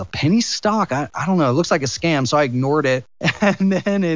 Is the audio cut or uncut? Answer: uncut